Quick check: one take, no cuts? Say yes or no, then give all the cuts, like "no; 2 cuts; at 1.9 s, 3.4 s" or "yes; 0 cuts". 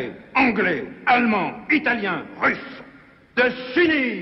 no; 1 cut; at 3.3 s